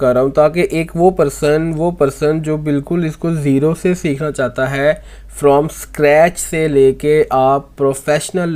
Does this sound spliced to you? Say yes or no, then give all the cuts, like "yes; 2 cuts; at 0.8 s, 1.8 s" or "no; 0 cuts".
no; 0 cuts